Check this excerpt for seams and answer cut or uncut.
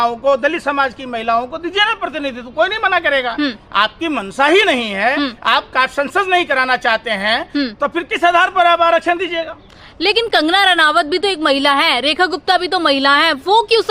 uncut